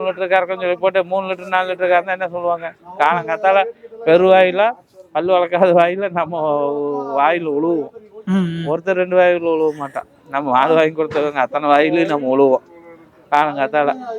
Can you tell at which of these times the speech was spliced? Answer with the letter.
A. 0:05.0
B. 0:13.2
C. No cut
C